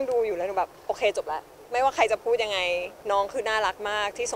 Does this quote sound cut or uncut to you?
cut